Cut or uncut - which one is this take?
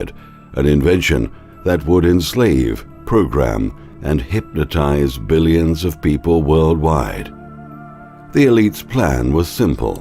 cut